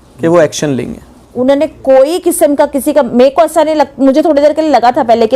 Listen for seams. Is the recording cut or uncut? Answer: cut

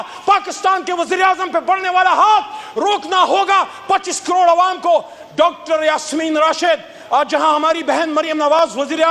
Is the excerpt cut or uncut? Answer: uncut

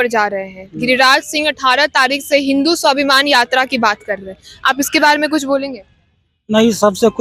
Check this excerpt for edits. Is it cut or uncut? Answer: uncut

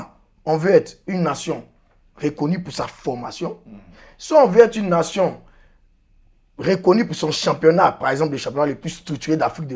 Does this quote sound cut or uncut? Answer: uncut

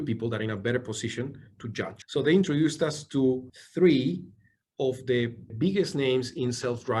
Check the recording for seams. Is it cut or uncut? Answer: cut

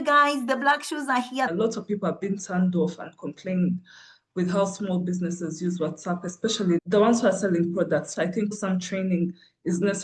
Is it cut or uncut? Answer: cut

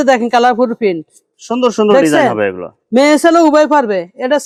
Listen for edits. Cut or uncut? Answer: uncut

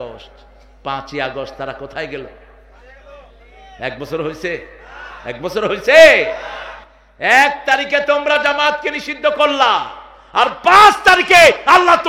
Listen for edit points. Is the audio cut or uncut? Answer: uncut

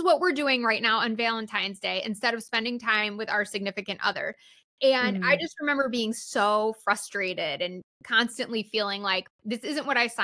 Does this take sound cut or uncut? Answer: cut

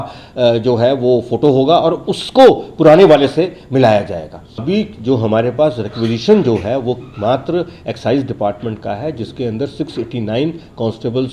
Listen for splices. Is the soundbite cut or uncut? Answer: cut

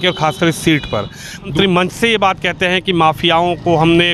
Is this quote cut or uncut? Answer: cut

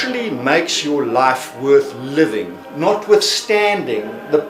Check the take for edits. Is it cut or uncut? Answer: uncut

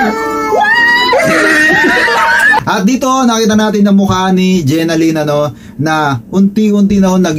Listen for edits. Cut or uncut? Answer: uncut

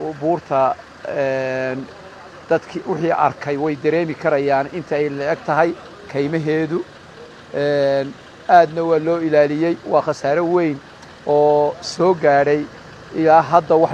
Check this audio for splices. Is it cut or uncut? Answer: uncut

